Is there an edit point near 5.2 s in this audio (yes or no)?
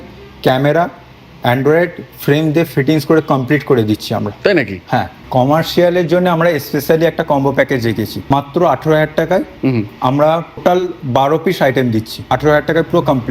yes